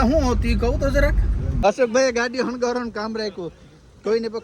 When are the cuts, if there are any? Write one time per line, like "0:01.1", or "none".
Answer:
0:01.4